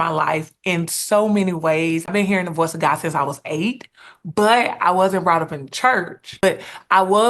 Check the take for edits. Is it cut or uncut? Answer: cut